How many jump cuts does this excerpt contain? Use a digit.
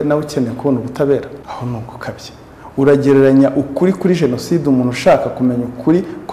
1